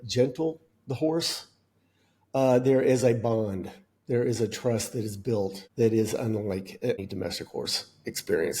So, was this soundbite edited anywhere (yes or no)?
yes